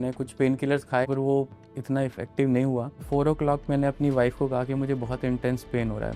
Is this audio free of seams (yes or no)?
no